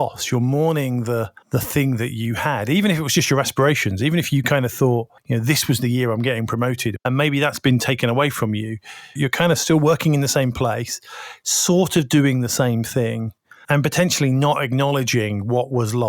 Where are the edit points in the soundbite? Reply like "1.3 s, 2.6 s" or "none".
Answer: 1.4 s, 5.2 s, 7.0 s, 9.2 s, 13.6 s